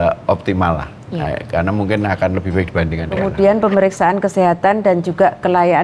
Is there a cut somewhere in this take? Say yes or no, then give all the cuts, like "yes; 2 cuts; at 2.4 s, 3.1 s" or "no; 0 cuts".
yes; 1 cut; at 3.3 s